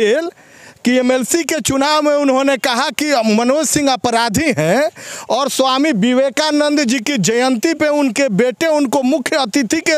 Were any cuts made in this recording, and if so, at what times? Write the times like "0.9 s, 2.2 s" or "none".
none